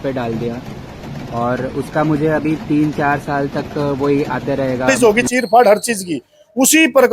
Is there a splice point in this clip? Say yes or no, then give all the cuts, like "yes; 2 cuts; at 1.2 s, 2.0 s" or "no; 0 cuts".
yes; 1 cut; at 4.9 s